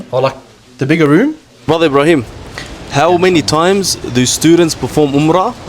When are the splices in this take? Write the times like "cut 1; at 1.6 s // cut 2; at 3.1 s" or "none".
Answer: cut 1; at 1.7 s